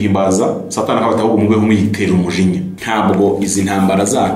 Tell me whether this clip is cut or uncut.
cut